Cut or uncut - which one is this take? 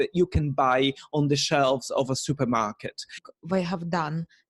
cut